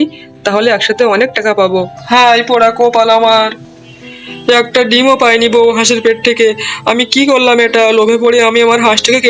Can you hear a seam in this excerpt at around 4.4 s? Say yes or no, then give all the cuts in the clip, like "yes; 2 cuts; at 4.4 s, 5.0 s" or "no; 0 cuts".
no; 1 cut; at 2.0 s